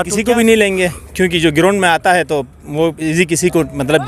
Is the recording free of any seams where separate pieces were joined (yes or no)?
yes